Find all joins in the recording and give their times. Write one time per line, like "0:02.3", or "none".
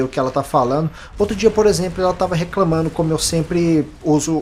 none